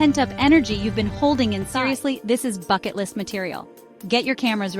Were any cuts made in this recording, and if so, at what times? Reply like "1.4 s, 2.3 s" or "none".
1.6 s